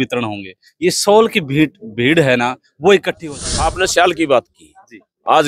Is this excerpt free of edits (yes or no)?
no